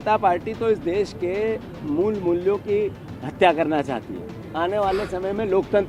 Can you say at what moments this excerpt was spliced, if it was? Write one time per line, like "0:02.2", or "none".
none